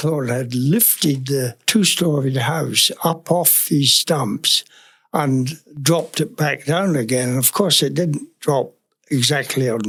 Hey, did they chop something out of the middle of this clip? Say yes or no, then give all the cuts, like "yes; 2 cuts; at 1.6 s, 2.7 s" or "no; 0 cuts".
no; 0 cuts